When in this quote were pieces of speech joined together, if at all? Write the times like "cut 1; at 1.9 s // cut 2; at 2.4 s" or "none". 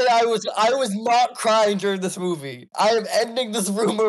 cut 1; at 2.5 s